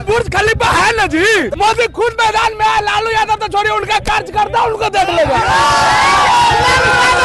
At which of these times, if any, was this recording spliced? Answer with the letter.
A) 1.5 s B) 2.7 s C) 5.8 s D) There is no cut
A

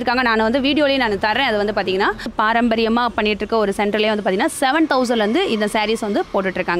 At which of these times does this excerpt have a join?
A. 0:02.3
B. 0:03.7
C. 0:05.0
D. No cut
A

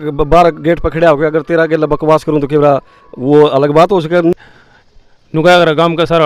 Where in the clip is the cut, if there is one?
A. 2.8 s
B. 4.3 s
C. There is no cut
B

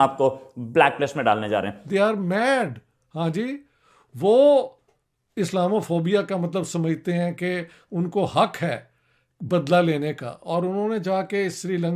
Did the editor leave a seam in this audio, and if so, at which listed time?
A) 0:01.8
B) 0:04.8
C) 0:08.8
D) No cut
A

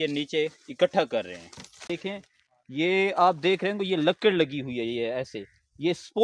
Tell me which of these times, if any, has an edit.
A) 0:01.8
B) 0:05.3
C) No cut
A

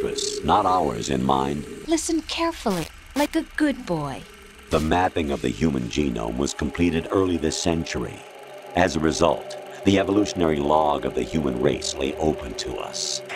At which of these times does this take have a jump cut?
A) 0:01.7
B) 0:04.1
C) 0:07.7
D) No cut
A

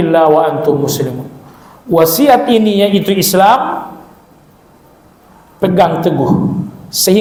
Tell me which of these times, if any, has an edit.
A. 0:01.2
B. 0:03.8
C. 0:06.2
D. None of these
D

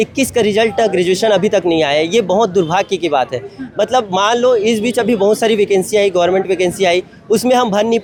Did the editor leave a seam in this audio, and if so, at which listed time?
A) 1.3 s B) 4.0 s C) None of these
C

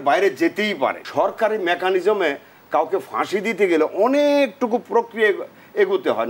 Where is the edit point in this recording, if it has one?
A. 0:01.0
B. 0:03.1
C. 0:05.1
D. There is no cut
A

